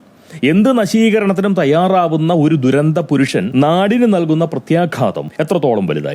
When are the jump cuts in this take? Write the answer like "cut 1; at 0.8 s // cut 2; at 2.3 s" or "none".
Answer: cut 1; at 3.5 s // cut 2; at 5.2 s